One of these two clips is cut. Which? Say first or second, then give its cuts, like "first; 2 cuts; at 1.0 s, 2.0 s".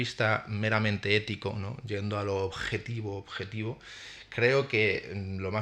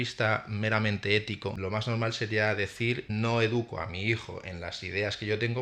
second; 2 cuts; at 1.6 s, 3.0 s